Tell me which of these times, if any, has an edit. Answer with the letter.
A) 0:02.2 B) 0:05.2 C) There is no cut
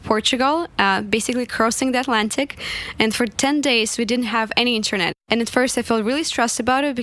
B